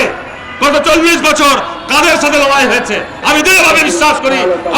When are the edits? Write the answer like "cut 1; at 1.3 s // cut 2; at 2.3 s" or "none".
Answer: cut 1; at 3.2 s